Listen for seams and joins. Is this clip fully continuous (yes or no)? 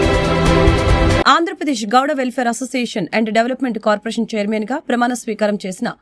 yes